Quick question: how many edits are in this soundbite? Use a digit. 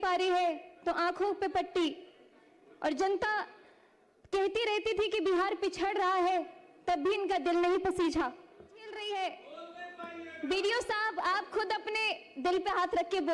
1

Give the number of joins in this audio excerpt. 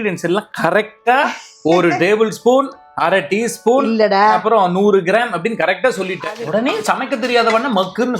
1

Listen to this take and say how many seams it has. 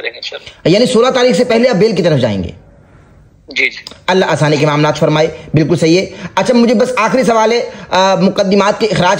0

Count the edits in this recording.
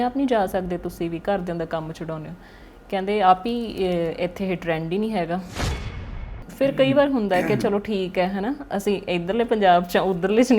1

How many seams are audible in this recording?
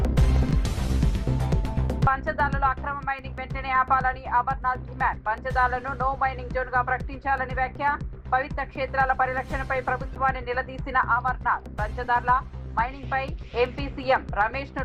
1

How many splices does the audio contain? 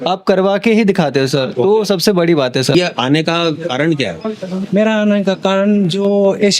1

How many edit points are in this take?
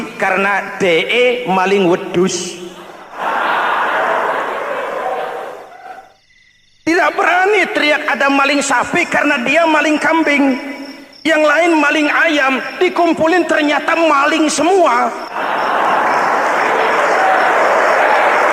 1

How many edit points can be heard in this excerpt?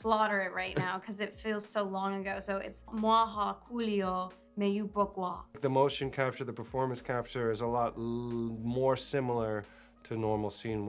2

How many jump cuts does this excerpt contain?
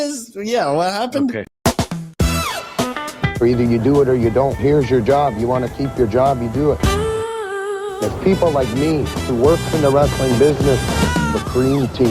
1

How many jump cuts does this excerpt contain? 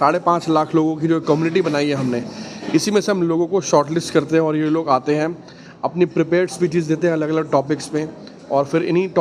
0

